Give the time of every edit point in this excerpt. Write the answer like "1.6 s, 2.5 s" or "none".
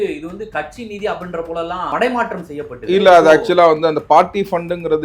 1.9 s